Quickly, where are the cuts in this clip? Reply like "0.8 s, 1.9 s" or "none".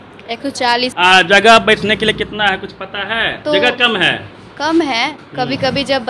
0.9 s, 3.4 s